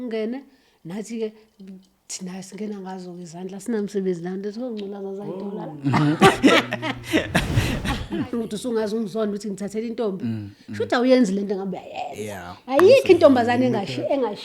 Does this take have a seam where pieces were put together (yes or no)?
yes